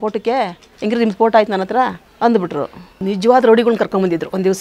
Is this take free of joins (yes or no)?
no